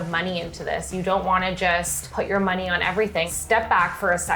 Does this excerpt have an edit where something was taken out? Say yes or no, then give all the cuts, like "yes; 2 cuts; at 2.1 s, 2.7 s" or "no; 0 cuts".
yes; 2 cuts; at 2.1 s, 3.3 s